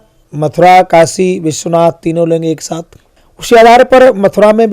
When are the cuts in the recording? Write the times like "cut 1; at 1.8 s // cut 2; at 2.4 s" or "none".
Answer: none